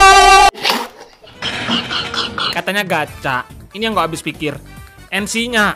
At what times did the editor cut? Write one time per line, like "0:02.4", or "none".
0:02.4

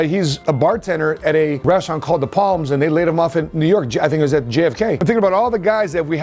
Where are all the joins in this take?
0:05.0

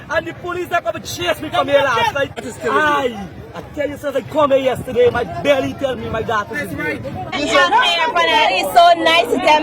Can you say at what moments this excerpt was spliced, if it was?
0:02.5
0:07.4

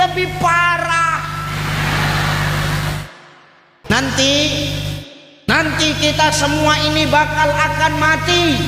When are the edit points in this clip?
0:03.8

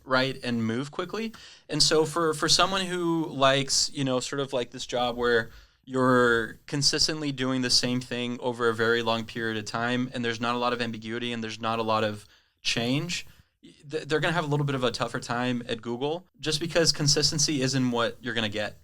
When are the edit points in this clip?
0:16.3

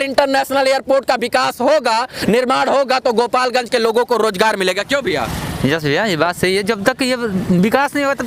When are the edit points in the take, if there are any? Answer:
none

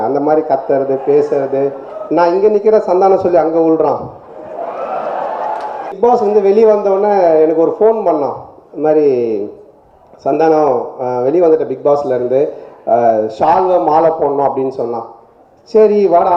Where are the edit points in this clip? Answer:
0:05.9

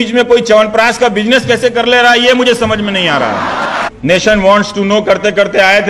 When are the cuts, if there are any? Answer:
0:03.8

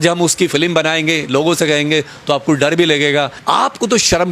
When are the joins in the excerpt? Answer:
0:03.4

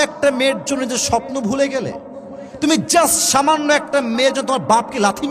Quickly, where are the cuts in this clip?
none

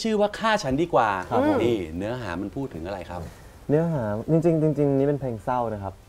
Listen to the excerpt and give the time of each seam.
none

